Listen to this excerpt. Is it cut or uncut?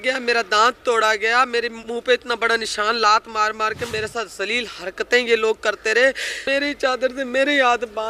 cut